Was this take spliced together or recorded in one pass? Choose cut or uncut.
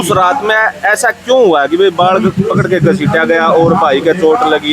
uncut